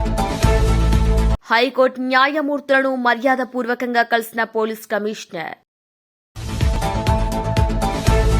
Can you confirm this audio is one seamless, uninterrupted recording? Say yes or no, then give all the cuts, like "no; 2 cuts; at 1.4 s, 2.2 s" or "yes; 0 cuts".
no; 1 cut; at 0.9 s